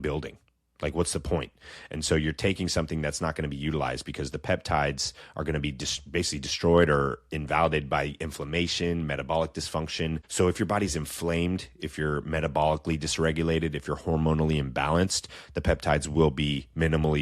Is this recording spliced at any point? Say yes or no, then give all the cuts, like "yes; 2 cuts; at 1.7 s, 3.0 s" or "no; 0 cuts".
yes; 1 cut; at 10.2 s